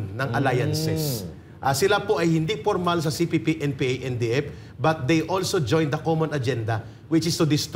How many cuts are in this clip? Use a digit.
0